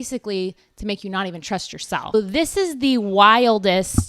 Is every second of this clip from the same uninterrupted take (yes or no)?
no